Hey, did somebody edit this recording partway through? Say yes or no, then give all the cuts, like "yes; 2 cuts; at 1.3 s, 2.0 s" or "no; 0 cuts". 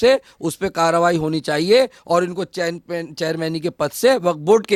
no; 0 cuts